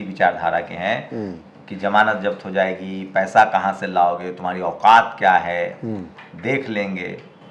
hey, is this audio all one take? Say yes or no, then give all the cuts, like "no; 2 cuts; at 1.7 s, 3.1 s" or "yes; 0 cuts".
yes; 0 cuts